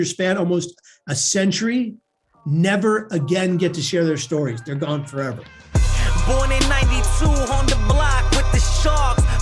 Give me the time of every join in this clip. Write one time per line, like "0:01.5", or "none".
0:05.5

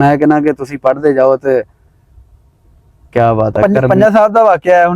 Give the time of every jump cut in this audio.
0:03.6

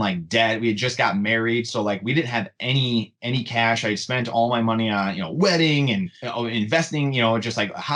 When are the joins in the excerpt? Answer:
none

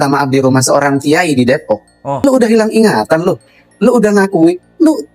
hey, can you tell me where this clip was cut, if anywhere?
0:02.2

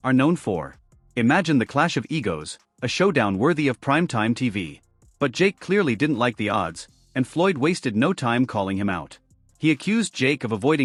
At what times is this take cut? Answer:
none

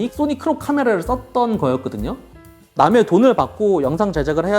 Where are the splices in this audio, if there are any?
0:02.4

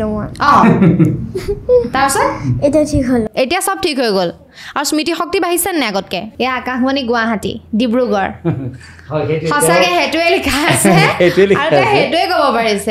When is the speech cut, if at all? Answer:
0:06.2

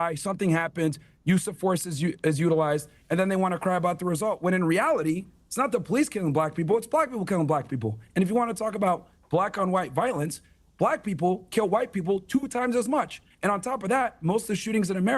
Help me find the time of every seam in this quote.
0:11.9

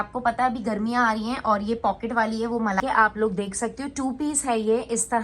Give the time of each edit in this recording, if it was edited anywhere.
0:02.8

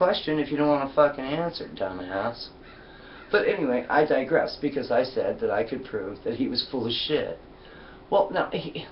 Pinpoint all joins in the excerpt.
0:02.2

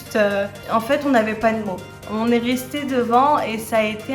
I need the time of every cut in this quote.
none

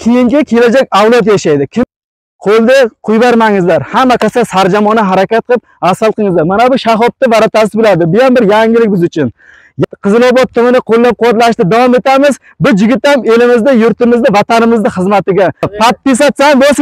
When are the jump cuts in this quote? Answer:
0:01.8
0:09.8
0:15.7

